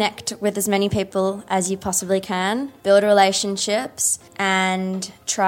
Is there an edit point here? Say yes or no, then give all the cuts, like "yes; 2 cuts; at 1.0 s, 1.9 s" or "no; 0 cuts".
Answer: yes; 2 cuts; at 2.7 s, 4.7 s